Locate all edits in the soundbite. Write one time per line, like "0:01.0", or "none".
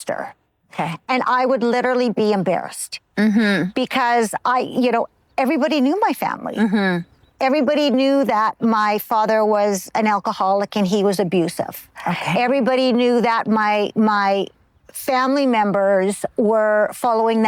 none